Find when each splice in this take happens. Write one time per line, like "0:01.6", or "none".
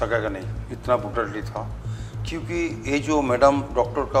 none